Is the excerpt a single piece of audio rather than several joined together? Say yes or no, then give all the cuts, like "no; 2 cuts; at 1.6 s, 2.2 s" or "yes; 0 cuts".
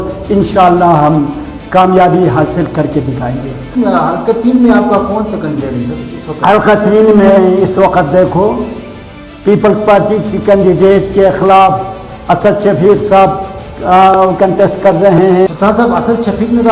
no; 2 cuts; at 3.8 s, 15.5 s